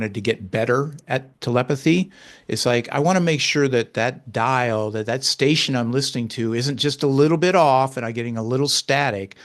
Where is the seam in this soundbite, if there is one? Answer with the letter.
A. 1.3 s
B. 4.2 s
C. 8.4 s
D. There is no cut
A